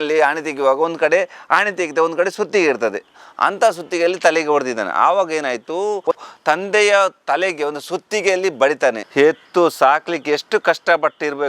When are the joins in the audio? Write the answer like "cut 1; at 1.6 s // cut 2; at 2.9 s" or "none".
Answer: cut 1; at 6.1 s // cut 2; at 9.0 s

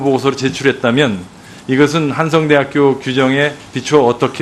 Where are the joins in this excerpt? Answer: cut 1; at 1.8 s

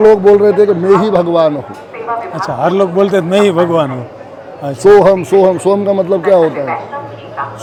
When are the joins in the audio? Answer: none

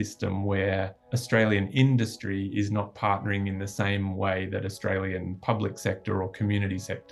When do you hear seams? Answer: none

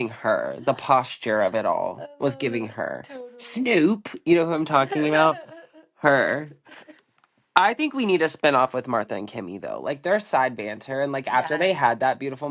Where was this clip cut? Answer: none

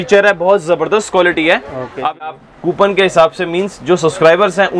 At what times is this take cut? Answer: cut 1; at 2.3 s

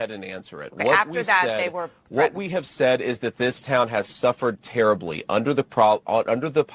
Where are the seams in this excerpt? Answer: none

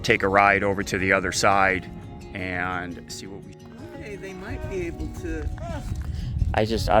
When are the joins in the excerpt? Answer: cut 1; at 3.6 s

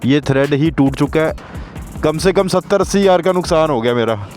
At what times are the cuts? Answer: cut 1; at 1.3 s

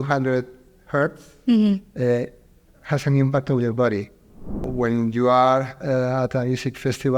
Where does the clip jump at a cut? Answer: cut 1; at 4.6 s

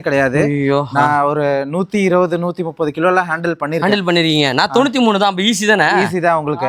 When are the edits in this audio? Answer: none

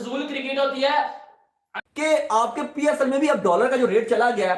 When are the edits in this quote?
cut 1; at 1.7 s

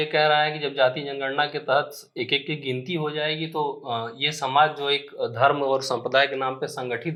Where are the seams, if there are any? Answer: none

